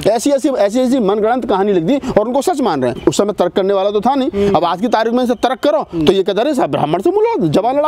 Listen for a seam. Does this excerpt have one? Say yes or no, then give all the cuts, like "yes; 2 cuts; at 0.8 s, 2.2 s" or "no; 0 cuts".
yes; 1 cut; at 3.0 s